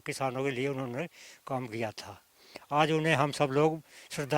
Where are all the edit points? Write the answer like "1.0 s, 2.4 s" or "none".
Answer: none